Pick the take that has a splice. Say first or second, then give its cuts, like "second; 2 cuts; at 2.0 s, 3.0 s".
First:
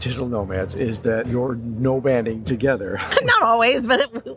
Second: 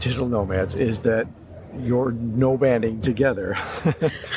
first; 2 cuts; at 1.3 s, 3.0 s